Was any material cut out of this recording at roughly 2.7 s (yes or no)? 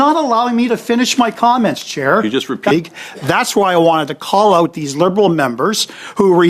yes